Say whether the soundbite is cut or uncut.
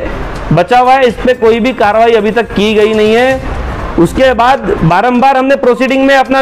uncut